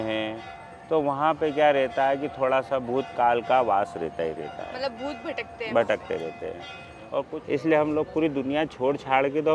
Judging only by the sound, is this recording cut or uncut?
cut